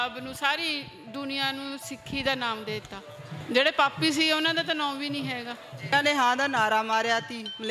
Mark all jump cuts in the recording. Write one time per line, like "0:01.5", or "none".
0:03.4
0:05.9